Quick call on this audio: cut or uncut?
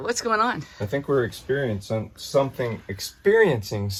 uncut